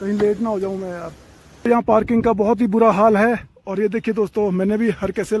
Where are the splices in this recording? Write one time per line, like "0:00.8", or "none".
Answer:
0:01.7